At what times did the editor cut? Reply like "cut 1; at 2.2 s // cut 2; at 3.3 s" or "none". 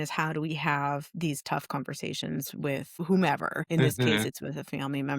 cut 1; at 3.0 s // cut 2; at 3.6 s